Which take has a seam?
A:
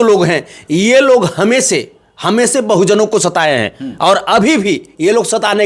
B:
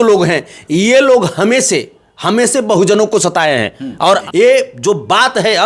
B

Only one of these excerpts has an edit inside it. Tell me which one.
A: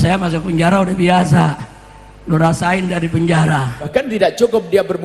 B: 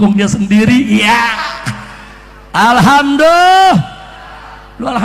A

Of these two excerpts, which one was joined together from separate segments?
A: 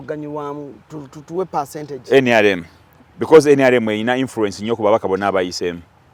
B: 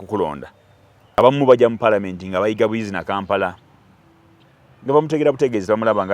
B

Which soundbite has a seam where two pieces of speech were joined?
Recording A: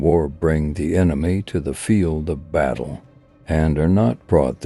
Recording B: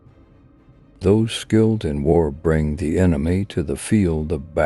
B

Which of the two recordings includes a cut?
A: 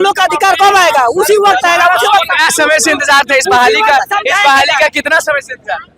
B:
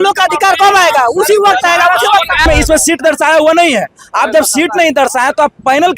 B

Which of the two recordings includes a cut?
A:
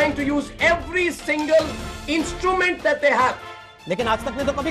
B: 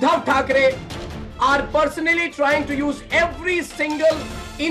A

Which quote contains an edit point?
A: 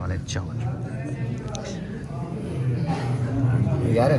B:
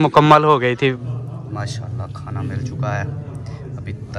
B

